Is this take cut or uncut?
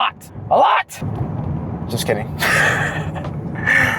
cut